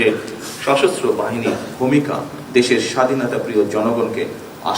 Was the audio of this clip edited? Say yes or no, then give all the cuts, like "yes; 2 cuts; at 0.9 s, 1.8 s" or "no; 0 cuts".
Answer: yes; 2 cuts; at 1.7 s, 2.4 s